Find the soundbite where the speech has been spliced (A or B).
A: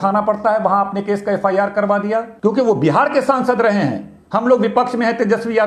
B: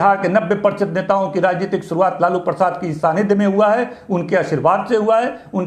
A